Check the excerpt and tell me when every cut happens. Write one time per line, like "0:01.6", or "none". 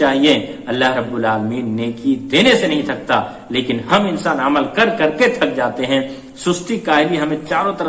none